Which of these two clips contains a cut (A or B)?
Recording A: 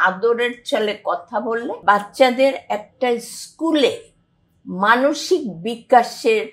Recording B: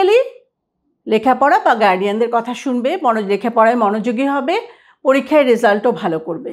A